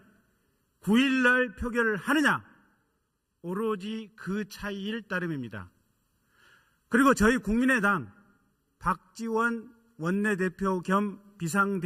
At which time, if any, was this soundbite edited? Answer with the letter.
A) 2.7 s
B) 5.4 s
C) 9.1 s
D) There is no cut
D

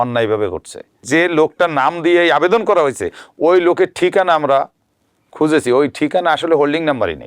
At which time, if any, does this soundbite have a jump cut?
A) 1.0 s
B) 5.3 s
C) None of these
A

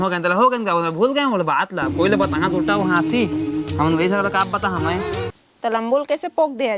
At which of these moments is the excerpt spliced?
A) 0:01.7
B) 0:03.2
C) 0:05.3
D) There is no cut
D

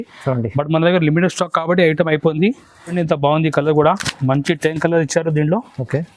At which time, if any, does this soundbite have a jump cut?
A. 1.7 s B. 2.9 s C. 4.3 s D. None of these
B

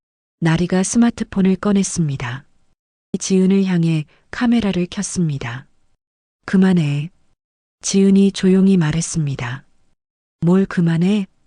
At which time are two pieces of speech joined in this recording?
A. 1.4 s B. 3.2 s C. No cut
B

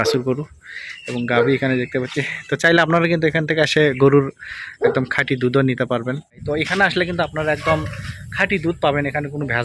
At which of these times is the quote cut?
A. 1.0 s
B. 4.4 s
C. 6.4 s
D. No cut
C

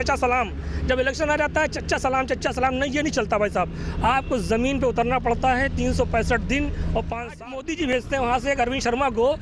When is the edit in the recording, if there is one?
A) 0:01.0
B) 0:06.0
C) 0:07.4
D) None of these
C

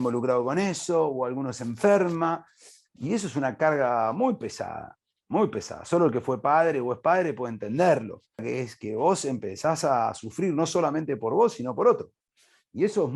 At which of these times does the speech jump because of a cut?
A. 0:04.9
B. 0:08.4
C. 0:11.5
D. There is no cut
B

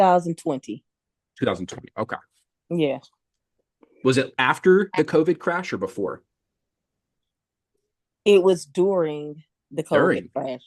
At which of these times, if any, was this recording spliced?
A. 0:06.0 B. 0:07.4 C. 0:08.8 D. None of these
D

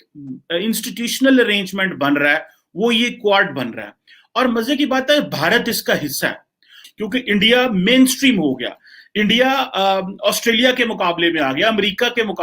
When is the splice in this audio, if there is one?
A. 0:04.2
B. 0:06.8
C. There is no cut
B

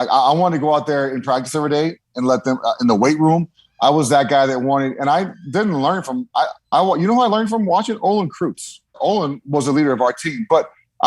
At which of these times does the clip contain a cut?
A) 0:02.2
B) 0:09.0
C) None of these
B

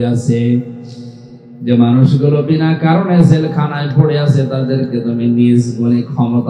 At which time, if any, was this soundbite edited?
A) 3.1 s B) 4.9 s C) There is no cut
C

